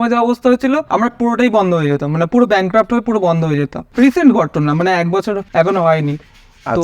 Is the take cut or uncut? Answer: cut